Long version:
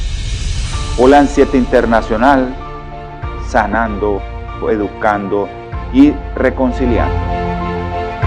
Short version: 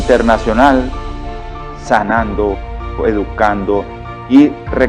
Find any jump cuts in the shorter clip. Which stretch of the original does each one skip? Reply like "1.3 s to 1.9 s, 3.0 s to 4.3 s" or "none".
none